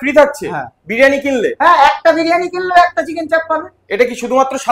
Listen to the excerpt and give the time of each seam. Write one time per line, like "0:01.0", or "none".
none